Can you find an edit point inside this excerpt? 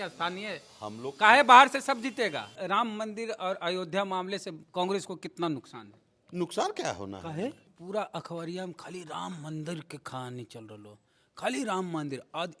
yes; 2 cuts; at 2.5 s, 7.7 s

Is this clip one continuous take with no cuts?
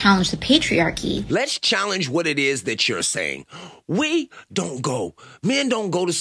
yes; 0 cuts

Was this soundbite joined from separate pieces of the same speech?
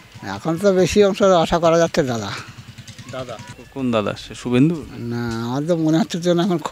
yes; 1 cut; at 3.6 s

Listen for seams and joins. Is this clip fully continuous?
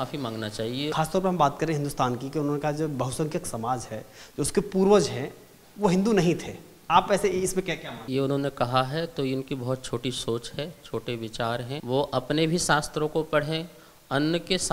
no; 3 cuts; at 0.9 s, 8.0 s, 11.7 s

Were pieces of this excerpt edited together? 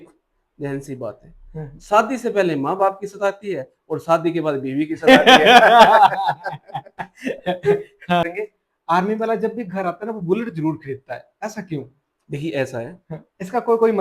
yes; 1 cut; at 8.3 s

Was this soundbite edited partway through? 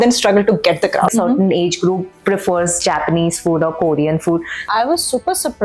yes; 2 cuts; at 1.1 s, 4.7 s

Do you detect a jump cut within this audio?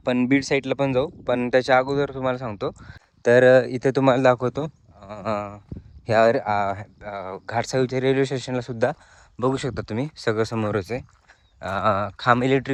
no; 0 cuts

